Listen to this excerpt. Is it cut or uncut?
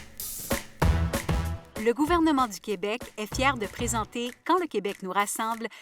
cut